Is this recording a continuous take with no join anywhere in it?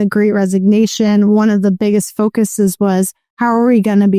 yes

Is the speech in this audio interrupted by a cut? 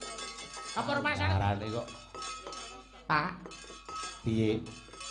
yes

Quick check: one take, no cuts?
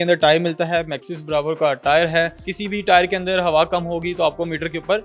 no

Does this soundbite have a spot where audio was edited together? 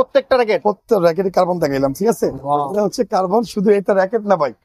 no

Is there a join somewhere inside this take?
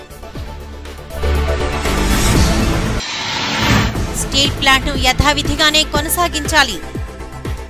yes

